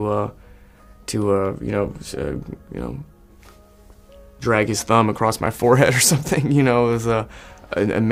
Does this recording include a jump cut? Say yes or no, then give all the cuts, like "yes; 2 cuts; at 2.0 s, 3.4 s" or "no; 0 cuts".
no; 0 cuts